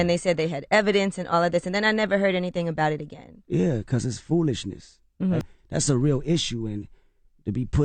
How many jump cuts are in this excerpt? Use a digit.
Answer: 1